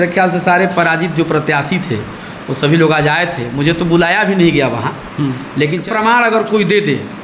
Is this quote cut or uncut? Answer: cut